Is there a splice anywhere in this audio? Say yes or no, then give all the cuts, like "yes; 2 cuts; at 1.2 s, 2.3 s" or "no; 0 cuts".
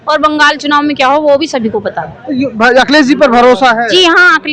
no; 0 cuts